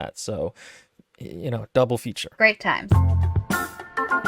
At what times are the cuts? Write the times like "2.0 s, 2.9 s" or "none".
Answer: 2.9 s